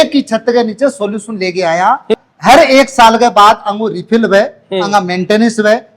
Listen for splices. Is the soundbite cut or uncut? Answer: cut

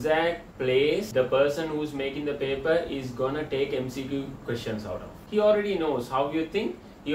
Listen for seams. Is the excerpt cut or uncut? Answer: cut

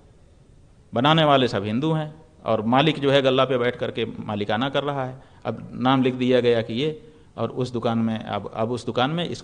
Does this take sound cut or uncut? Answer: uncut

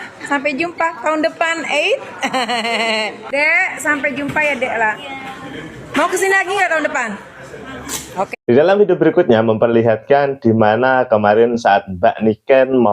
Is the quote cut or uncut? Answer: uncut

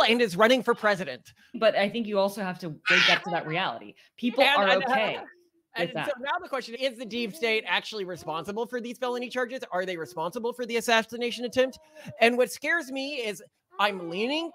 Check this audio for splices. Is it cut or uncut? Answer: cut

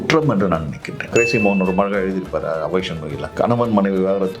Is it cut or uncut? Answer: cut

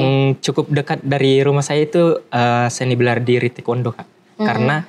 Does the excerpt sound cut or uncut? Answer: uncut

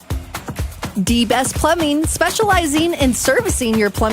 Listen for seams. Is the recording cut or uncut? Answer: cut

